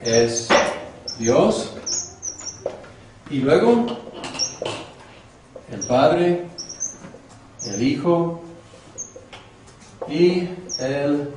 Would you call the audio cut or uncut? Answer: cut